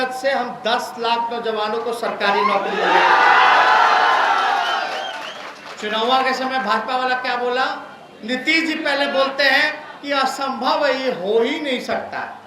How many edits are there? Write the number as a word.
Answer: zero